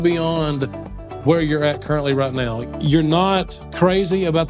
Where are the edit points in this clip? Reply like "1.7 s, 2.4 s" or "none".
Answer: 2.6 s